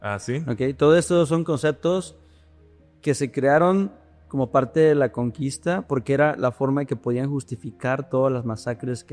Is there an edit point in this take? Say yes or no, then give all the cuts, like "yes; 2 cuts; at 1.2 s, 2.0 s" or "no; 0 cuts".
no; 0 cuts